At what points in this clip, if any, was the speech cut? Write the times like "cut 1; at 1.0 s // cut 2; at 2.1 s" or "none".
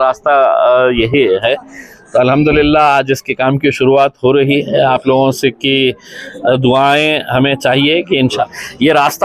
cut 1; at 8.3 s